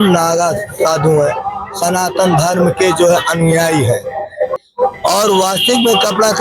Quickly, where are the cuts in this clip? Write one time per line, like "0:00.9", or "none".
0:04.5